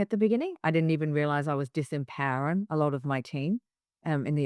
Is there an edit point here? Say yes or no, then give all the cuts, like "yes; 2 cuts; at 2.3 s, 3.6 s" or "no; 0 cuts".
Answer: no; 0 cuts